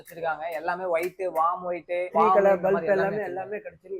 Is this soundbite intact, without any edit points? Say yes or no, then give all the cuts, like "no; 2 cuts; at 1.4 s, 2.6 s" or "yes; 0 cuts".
no; 1 cut; at 2.1 s